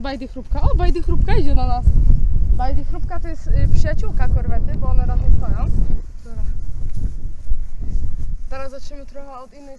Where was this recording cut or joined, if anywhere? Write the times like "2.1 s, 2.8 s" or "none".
6.0 s